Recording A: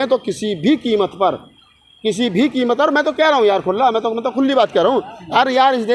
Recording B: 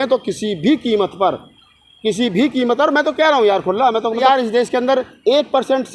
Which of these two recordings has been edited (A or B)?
B